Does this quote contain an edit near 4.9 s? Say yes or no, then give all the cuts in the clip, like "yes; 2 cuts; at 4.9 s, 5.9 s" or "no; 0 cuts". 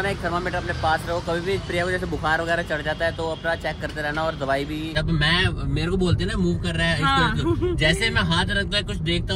yes; 1 cut; at 4.9 s